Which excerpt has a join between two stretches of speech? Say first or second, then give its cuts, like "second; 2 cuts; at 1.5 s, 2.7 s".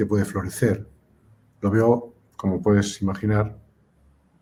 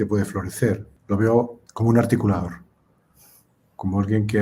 second; 2 cuts; at 0.9 s, 1.6 s